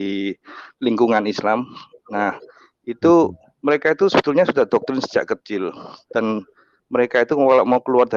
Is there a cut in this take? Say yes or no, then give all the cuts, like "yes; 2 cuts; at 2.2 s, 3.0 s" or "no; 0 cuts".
no; 0 cuts